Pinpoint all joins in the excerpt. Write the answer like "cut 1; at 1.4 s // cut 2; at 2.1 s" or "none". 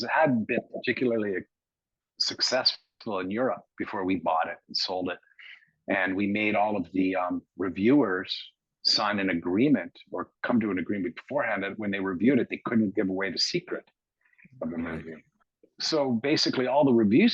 cut 1; at 15.5 s